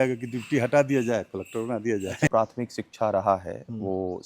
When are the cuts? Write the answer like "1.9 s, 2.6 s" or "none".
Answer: 2.3 s

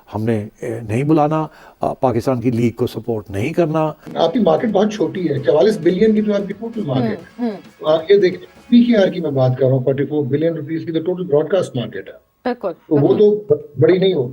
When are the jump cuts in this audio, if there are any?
4.1 s

